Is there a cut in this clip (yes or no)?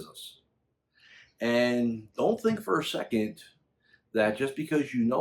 no